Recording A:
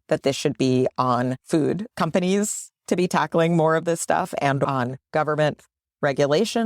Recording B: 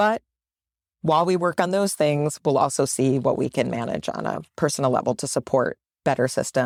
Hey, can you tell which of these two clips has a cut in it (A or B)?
A